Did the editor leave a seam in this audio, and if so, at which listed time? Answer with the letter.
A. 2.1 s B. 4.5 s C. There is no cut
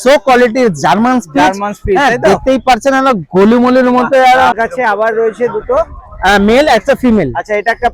B